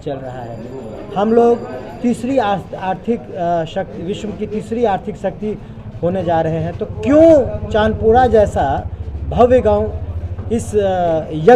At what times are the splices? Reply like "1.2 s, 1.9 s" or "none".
none